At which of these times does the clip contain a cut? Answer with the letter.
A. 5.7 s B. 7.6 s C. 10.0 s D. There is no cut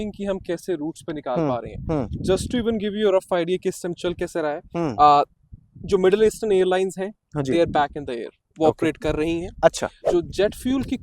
C